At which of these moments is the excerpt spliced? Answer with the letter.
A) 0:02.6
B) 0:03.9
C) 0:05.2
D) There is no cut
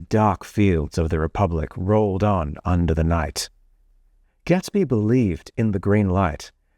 B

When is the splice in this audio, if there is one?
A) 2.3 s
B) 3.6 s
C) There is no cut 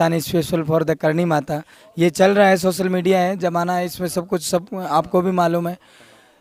C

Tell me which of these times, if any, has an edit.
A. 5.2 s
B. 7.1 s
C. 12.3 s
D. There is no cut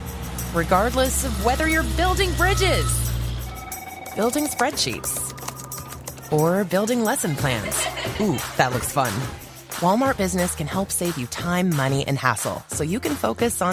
D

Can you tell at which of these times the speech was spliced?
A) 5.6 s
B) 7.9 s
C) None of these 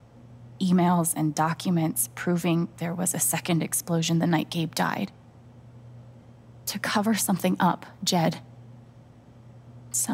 C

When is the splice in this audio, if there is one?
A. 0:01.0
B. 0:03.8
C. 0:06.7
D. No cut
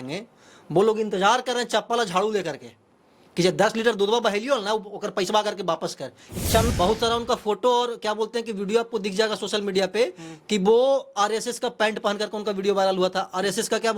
C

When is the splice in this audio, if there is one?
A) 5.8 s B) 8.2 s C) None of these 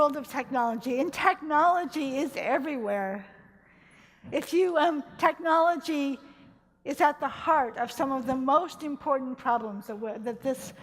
C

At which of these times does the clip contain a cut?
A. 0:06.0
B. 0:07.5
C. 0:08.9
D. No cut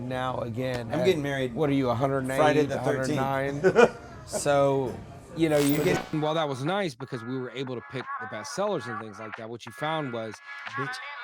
A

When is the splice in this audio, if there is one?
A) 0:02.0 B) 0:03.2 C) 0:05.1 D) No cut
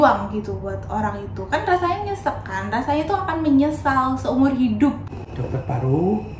C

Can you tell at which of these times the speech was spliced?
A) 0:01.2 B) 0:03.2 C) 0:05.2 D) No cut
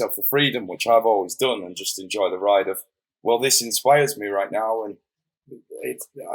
D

